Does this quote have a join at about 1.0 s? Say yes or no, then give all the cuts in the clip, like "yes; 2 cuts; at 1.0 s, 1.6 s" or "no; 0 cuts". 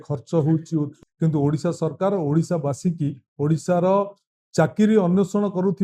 yes; 1 cut; at 1.0 s